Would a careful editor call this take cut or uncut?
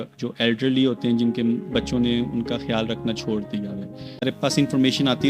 cut